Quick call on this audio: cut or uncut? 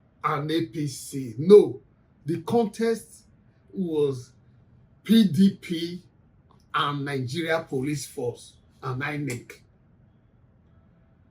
uncut